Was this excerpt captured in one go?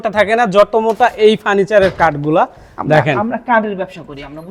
yes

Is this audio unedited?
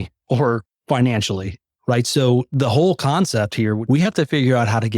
no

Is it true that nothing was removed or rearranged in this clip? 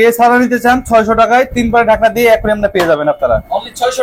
yes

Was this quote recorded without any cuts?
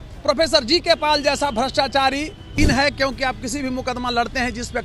no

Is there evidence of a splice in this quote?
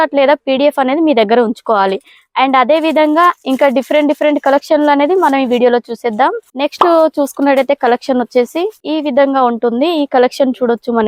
no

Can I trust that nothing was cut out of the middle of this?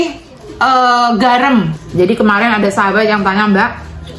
no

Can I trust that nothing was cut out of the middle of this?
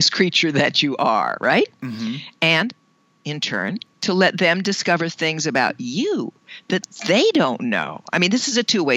yes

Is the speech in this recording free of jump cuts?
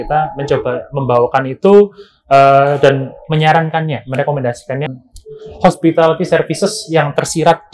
no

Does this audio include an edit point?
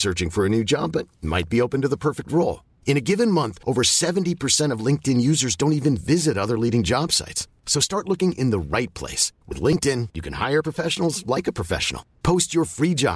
no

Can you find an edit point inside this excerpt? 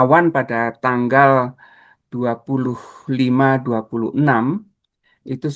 no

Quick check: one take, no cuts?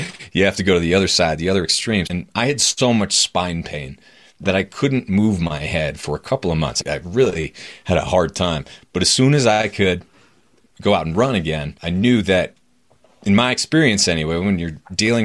no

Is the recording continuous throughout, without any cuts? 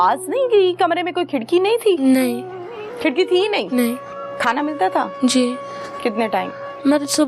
yes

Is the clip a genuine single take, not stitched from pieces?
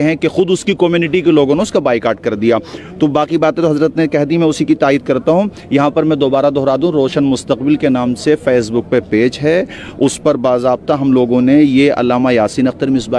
yes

